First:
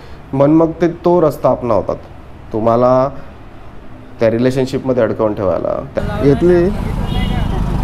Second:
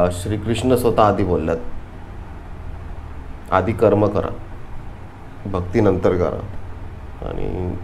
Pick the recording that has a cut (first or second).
first